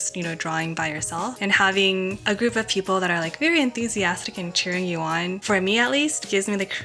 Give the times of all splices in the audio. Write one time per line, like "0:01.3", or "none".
none